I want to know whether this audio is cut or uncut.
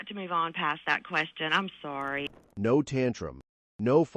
uncut